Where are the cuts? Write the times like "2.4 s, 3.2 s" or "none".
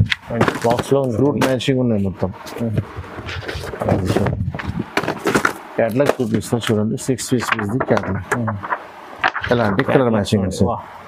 none